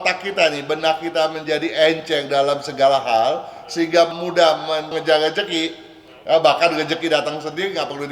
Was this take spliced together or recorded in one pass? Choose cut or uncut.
uncut